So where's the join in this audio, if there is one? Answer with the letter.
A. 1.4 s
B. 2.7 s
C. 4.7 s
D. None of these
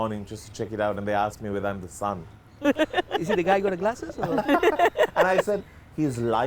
D